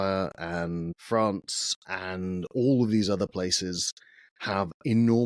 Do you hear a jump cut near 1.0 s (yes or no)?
yes